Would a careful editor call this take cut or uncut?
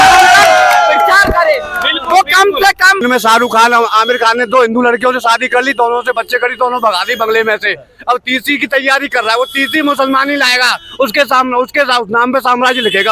cut